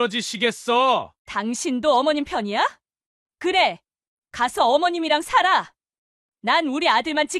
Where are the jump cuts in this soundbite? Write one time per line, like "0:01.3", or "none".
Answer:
none

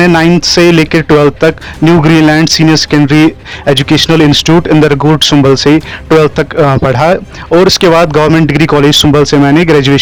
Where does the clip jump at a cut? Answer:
none

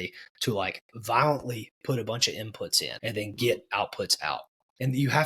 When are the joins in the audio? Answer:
0:02.9

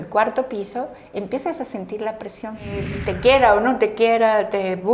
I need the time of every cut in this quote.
0:02.9

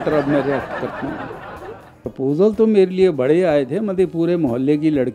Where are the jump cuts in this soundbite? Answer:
0:01.9

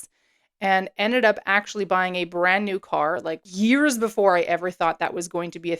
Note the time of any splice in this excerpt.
0:03.5

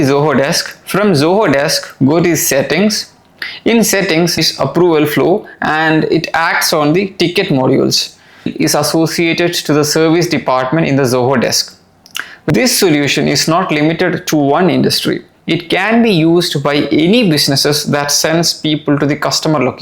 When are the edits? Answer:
0:04.3
0:08.5
0:12.5

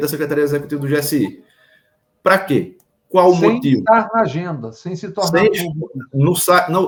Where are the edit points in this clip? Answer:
none

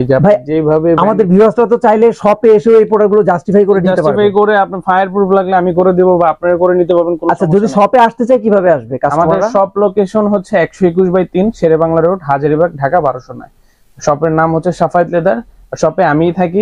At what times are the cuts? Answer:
none

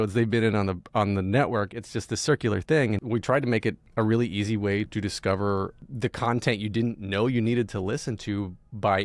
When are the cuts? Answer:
0:03.4
0:04.9
0:05.8

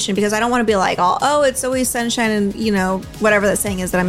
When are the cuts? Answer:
0:03.1

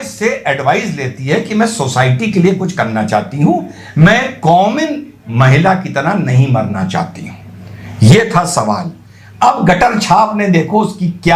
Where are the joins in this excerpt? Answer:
none

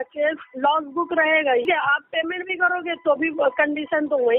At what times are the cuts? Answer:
0:01.7

